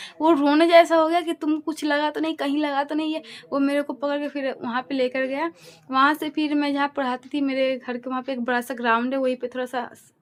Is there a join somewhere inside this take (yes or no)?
no